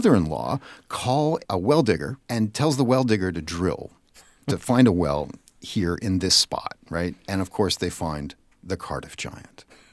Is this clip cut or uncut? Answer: cut